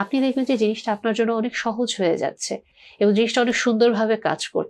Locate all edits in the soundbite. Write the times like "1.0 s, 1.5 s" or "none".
none